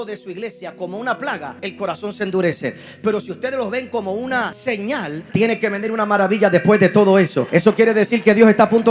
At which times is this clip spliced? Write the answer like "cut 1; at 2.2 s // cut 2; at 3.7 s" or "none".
cut 1; at 1.5 s // cut 2; at 5.1 s // cut 3; at 7.4 s